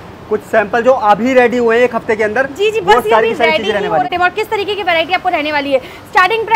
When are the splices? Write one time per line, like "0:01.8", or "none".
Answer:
0:04.1